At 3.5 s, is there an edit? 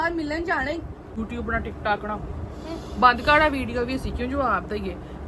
no; 1 cut; at 1.1 s

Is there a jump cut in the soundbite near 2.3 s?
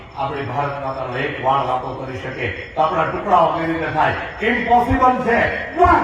no; 0 cuts

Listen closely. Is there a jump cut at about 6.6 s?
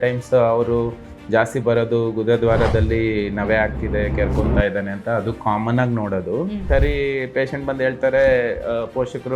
yes; 1 cut; at 6.6 s

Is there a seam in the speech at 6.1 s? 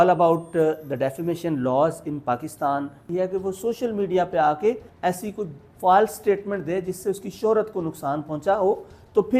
no; 2 cuts; at 3.0 s, 4.9 s

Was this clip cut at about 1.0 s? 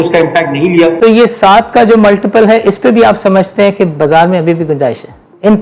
yes; 1 cut; at 1.0 s

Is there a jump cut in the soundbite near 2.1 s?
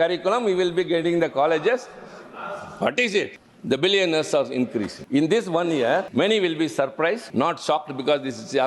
no; 4 cuts; at 3.5 s, 5.0 s, 6.1 s, 7.2 s

